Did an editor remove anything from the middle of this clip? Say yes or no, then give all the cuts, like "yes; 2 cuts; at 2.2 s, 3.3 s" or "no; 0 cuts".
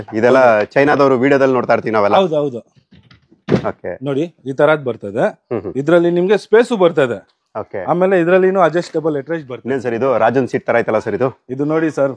yes; 1 cut; at 9.6 s